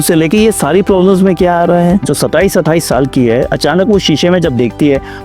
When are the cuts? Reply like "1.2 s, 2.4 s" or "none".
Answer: 2.1 s